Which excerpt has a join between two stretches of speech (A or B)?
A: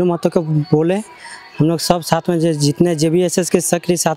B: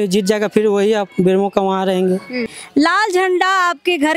B